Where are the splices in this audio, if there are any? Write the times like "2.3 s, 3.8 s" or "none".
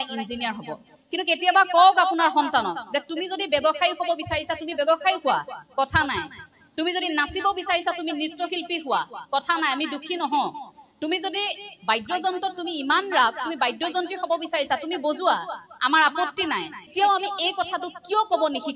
16.9 s